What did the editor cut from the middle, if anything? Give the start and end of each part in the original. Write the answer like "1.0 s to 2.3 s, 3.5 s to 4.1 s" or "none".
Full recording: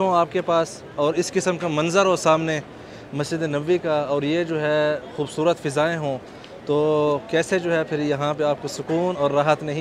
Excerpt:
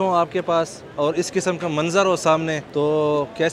2.6 s to 6.6 s